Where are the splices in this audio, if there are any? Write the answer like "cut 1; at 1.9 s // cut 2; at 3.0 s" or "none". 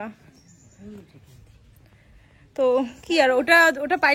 none